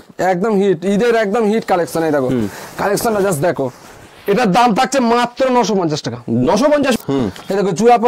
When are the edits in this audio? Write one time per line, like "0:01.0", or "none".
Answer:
0:07.0